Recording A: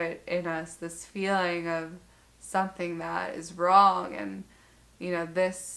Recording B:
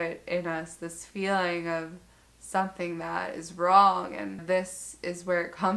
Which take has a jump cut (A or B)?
B